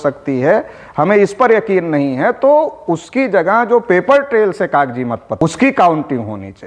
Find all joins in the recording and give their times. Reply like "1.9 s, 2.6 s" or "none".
5.4 s